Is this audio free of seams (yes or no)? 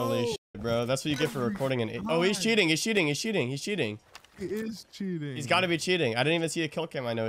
yes